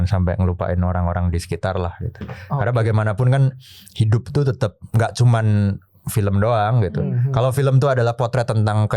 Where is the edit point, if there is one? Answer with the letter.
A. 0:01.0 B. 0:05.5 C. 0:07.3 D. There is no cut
D